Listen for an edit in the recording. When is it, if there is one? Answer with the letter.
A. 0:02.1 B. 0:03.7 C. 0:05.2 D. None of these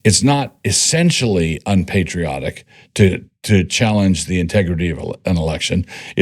D